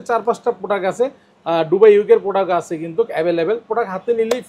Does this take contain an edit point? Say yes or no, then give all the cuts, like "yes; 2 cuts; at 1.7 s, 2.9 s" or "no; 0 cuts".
no; 0 cuts